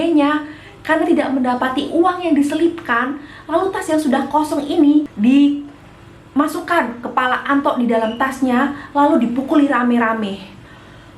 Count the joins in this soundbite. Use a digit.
1